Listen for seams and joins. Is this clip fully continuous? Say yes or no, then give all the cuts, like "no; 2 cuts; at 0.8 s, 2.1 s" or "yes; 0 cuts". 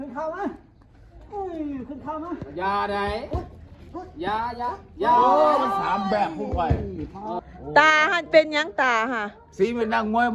no; 1 cut; at 7.4 s